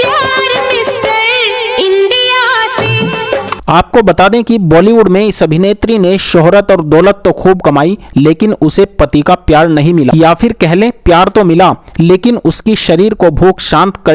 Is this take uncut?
no; 2 cuts; at 3.6 s, 10.1 s

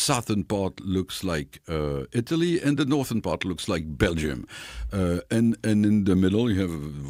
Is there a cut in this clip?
no; 0 cuts

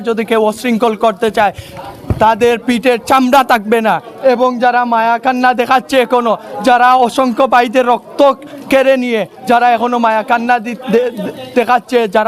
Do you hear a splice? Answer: no; 0 cuts

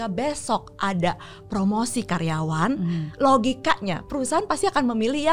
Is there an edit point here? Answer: no; 0 cuts

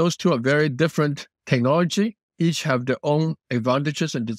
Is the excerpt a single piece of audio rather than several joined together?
no; 1 cut; at 2.2 s

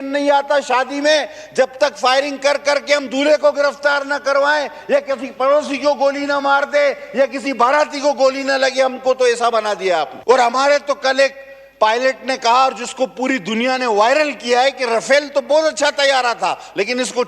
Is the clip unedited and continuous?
no; 1 cut; at 10.1 s

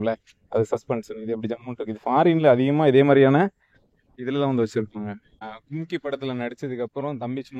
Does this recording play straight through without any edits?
no; 1 cut; at 5.5 s

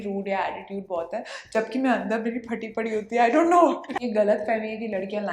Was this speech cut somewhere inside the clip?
yes; 1 cut; at 4.0 s

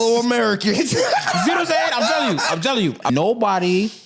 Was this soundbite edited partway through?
yes; 1 cut; at 3.1 s

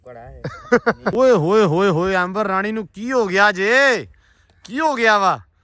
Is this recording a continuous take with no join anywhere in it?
no; 1 cut; at 1.1 s

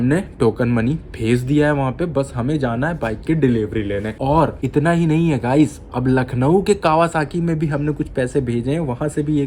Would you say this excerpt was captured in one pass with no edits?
yes; 0 cuts

